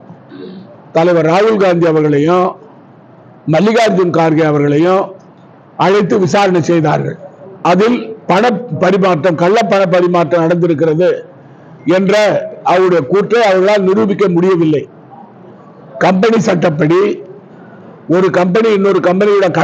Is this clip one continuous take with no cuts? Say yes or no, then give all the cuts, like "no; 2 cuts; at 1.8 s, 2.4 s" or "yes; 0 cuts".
no; 1 cut; at 7.6 s